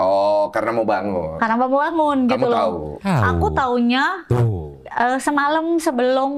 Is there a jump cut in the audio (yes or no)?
no